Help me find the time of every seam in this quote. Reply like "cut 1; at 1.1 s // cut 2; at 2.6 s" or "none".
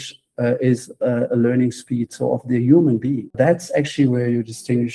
cut 1; at 3.3 s